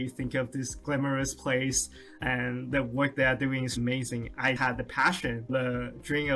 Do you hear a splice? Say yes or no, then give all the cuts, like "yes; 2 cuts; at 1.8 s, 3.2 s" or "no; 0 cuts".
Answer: no; 0 cuts